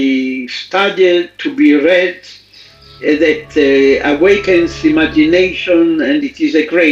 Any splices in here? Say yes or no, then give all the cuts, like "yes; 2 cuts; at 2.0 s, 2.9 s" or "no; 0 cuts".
no; 0 cuts